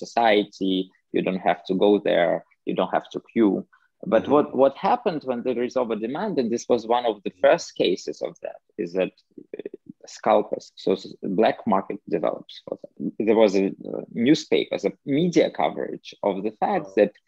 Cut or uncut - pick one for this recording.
cut